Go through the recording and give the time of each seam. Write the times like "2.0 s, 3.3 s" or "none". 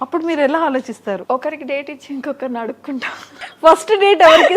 1.2 s, 3.4 s

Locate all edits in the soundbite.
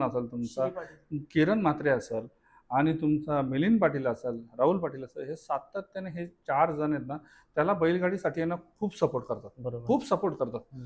none

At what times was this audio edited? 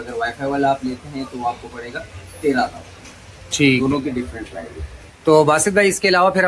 none

